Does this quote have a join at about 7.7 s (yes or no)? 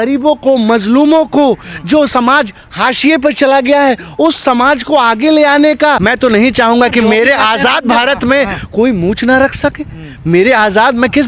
no